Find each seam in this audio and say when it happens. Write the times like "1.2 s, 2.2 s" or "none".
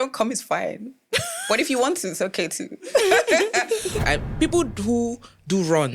4.0 s